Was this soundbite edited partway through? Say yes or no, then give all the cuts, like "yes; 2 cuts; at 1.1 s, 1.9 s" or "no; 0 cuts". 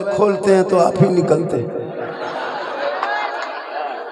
no; 0 cuts